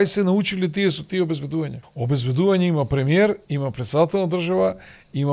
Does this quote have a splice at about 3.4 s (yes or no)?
no